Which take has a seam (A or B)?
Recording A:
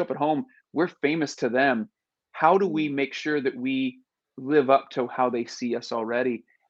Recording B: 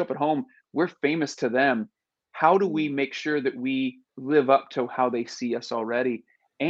B